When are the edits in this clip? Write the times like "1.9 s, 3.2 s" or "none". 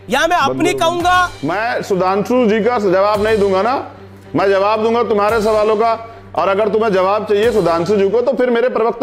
none